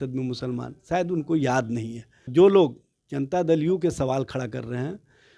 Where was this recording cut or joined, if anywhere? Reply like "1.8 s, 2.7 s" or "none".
2.2 s